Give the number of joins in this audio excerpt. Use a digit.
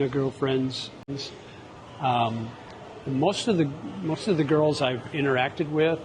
1